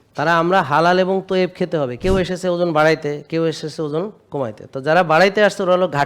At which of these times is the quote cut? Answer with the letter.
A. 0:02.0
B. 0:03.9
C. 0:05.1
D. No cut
A